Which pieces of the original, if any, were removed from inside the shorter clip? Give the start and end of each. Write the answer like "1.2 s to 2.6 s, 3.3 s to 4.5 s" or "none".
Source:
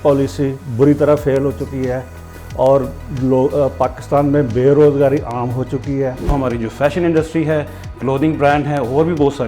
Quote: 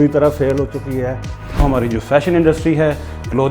2.4 s to 6.2 s